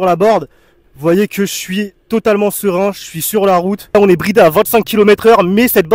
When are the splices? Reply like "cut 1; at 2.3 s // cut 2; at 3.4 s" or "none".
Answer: cut 1; at 4.0 s